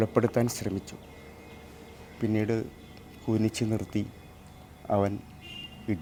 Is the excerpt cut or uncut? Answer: uncut